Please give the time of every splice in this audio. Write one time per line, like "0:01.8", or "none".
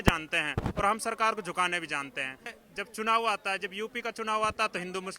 0:02.6